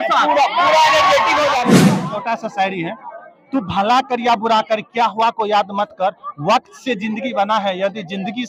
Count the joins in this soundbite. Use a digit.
1